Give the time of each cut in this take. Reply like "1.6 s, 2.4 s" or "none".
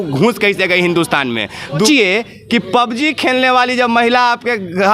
1.9 s